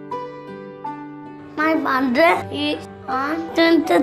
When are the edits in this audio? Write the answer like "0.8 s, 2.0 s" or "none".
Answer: 1.5 s